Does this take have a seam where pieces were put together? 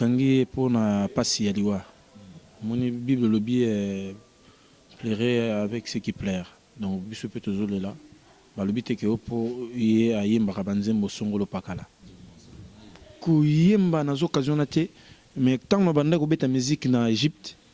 yes; 1 cut; at 12.0 s

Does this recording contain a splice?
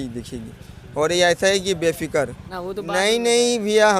yes; 1 cut; at 2.5 s

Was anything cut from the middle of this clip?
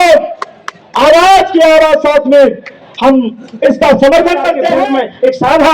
yes; 1 cut; at 4.5 s

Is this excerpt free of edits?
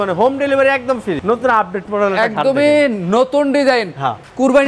no; 1 cut; at 1.2 s

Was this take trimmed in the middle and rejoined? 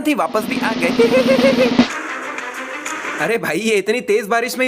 yes; 1 cut; at 2.0 s

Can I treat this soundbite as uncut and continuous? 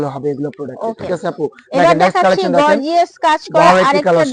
yes; 0 cuts

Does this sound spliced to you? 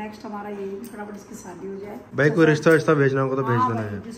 yes; 1 cut; at 2.1 s

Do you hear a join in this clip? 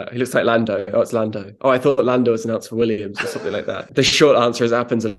yes; 1 cut; at 3.9 s

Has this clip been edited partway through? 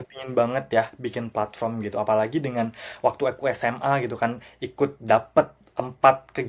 no; 0 cuts

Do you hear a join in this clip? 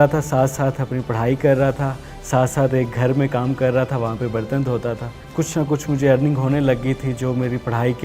yes; 1 cut; at 5.2 s

